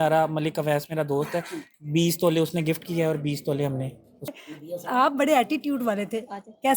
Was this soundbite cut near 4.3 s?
yes; 1 cut; at 4.3 s

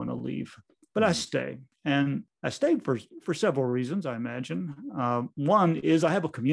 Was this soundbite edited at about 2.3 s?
yes; 2 cuts; at 1.6 s, 2.3 s

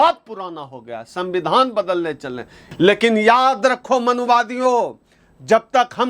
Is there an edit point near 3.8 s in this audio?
no; 1 cut; at 2.6 s

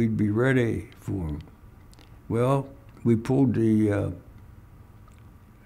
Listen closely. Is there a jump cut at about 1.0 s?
no; 1 cut; at 2.9 s

